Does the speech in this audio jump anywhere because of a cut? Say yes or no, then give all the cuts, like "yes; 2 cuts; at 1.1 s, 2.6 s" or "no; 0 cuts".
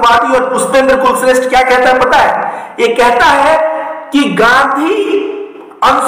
no; 0 cuts